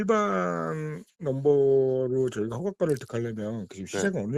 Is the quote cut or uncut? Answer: uncut